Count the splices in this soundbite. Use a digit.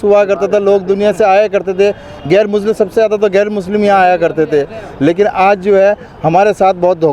0